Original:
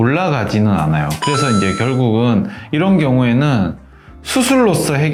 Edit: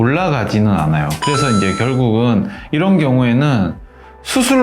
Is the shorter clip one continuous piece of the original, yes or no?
yes